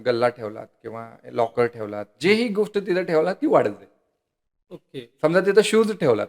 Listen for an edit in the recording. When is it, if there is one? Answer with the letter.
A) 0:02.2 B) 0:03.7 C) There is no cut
C